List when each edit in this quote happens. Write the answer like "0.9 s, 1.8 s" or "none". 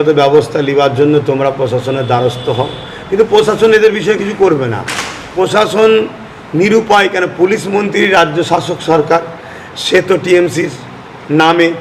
5.3 s